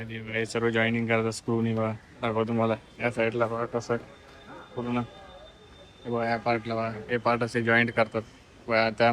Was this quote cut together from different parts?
no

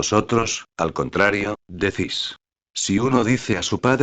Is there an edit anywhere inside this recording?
no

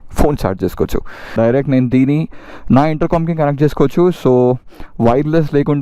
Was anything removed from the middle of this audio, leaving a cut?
yes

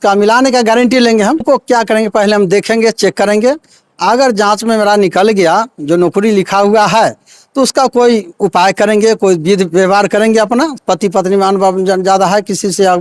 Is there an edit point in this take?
yes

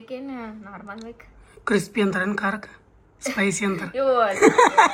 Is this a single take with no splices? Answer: yes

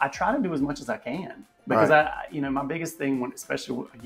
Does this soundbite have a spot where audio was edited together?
no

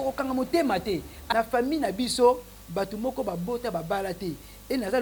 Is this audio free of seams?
no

